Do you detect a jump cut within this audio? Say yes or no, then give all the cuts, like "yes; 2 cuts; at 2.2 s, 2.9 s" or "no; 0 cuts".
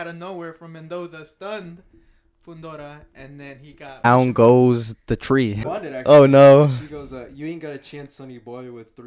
yes; 2 cuts; at 4.0 s, 5.6 s